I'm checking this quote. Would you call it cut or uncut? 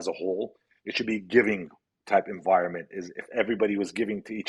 uncut